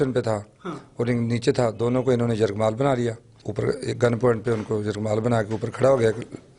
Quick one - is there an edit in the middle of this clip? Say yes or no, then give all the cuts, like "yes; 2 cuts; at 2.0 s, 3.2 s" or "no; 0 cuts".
no; 0 cuts